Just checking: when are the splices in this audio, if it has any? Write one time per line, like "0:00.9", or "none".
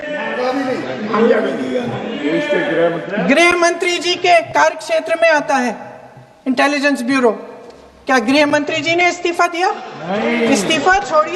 none